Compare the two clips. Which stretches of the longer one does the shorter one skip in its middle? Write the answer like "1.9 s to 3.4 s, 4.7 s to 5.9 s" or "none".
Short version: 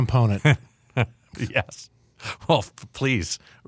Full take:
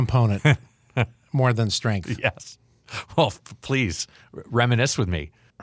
1.3 s to 2.0 s